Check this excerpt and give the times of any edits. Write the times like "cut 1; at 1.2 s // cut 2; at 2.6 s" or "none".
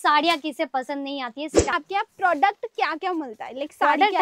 cut 1; at 1.7 s